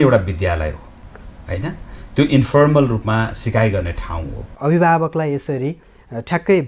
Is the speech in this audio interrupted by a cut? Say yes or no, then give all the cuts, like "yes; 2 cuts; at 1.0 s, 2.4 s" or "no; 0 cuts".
yes; 1 cut; at 4.5 s